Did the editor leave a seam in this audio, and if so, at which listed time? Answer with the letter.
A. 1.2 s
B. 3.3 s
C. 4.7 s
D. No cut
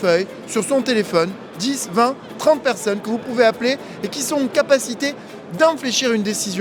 D